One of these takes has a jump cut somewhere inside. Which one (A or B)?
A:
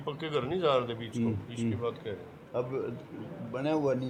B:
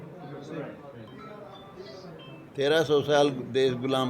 B